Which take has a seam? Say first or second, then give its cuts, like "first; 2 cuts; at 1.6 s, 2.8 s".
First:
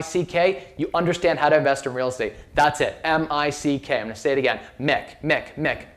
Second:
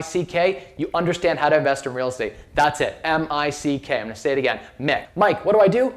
second; 1 cut; at 5.1 s